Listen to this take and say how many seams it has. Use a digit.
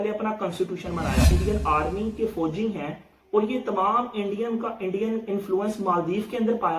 1